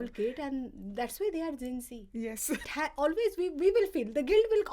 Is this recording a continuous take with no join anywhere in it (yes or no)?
no